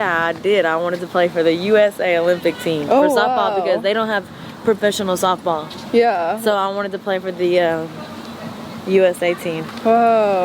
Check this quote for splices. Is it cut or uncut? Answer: uncut